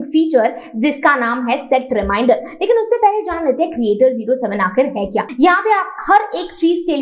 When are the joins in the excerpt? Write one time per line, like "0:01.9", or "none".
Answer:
0:05.3

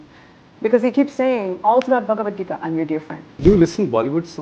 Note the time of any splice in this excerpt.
0:03.2

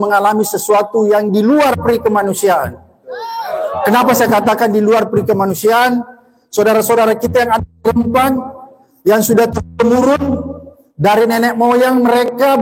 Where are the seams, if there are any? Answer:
none

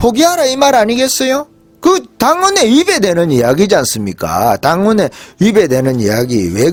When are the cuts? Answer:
none

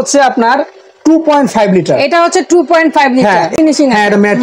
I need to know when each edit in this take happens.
0:03.5

